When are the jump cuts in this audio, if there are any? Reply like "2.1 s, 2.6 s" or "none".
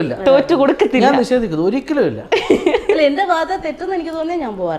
none